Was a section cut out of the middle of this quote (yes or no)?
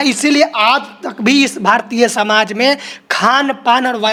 no